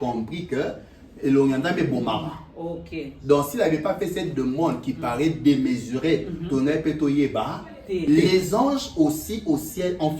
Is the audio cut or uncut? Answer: cut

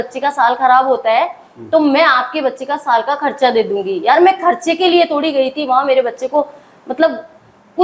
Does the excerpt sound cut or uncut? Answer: uncut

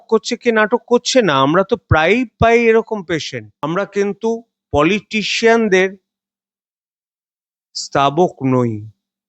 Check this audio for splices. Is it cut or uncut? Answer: cut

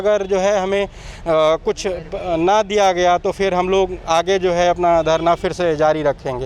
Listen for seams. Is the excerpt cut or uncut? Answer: uncut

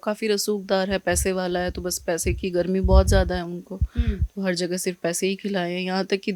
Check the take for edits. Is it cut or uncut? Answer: uncut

